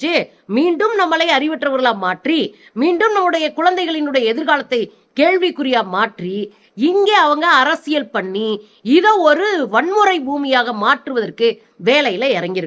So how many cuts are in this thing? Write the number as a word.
zero